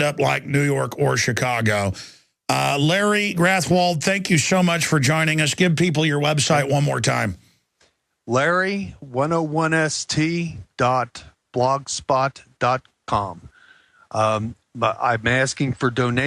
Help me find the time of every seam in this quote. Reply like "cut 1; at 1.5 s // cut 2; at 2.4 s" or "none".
cut 1; at 13.6 s